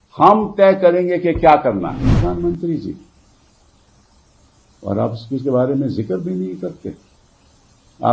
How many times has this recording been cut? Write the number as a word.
one